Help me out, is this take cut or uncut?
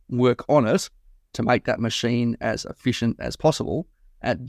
uncut